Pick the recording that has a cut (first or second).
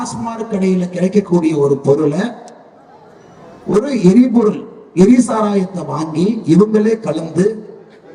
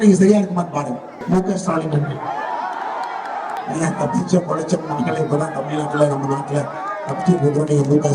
second